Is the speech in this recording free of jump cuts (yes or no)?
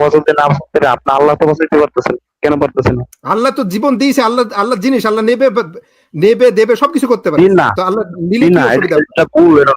no